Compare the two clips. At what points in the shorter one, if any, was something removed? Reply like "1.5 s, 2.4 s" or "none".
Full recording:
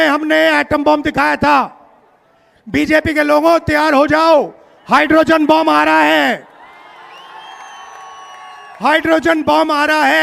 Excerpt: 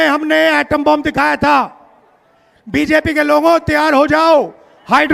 none